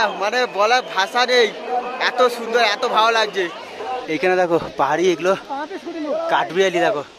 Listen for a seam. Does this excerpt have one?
yes; 1 cut; at 4.0 s

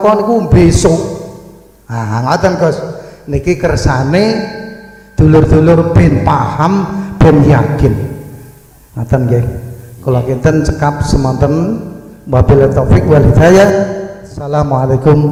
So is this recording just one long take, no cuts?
yes; 0 cuts

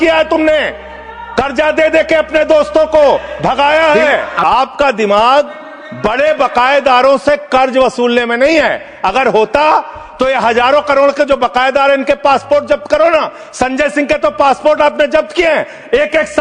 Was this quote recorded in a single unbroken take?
yes; 0 cuts

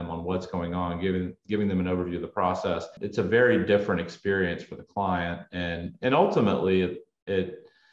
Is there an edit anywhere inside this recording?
yes; 1 cut; at 3.0 s

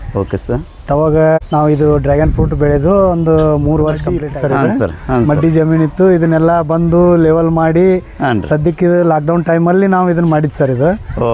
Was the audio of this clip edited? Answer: yes; 2 cuts; at 1.4 s, 4.2 s

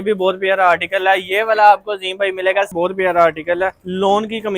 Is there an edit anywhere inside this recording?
yes; 1 cut; at 2.7 s

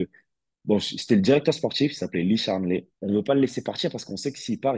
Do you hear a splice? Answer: no; 0 cuts

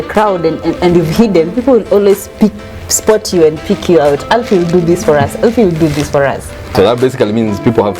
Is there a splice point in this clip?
yes; 1 cut; at 6.7 s

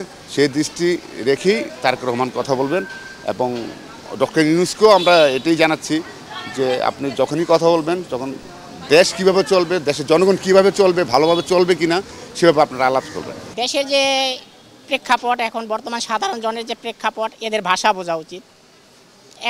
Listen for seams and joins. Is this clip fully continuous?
yes; 0 cuts

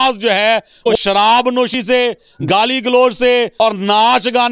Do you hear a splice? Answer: yes; 3 cuts; at 0.9 s, 1.9 s, 3.5 s

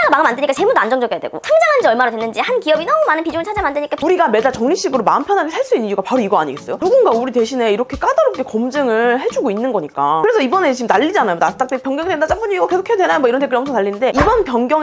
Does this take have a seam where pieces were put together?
yes; 2 cuts; at 3.9 s, 10.2 s

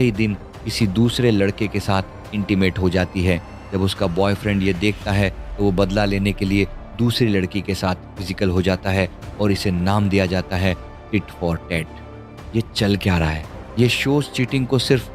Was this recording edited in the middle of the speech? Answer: no; 0 cuts

